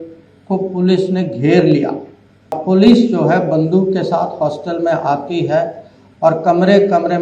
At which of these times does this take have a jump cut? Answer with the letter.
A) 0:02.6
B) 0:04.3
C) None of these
A